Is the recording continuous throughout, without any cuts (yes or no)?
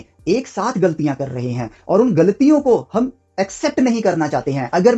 yes